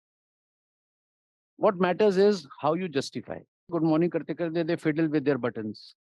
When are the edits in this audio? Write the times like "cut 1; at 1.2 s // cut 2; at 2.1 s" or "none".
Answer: cut 1; at 3.7 s